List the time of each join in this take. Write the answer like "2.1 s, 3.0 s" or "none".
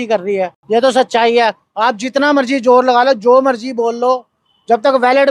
1.7 s